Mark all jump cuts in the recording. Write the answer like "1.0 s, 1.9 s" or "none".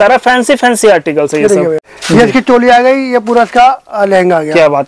1.9 s